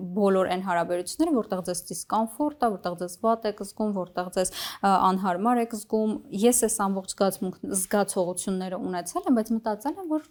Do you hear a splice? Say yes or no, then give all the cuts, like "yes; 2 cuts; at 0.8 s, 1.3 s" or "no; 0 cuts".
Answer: no; 0 cuts